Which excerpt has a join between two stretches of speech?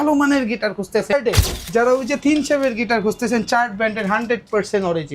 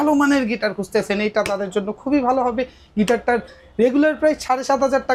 first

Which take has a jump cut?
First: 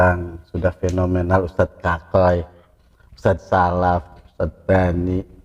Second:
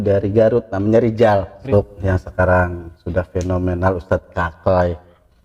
second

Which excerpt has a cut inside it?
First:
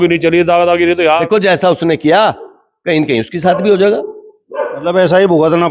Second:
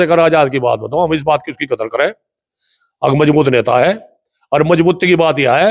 first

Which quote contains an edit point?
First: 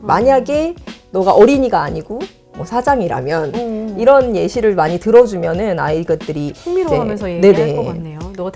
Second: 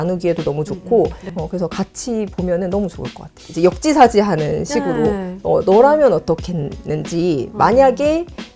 second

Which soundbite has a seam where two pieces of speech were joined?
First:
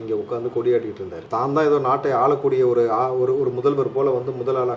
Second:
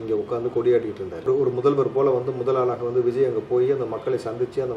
second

